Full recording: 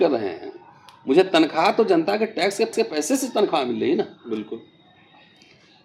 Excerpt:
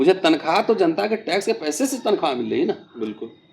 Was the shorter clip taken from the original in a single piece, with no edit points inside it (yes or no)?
no